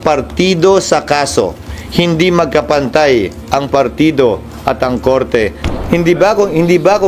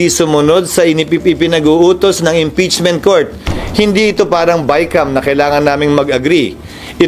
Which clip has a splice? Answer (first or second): first